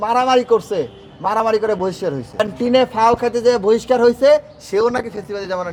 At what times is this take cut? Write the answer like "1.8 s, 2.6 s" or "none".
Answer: none